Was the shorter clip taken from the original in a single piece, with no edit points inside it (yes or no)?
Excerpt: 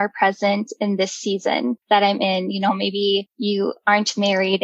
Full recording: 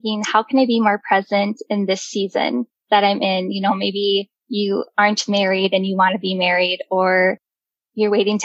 no